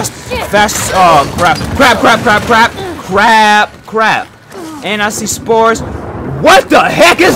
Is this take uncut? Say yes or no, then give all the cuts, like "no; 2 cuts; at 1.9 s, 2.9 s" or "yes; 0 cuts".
yes; 0 cuts